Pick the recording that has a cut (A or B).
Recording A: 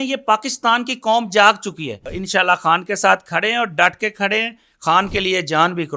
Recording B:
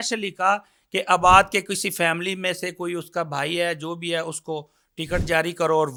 A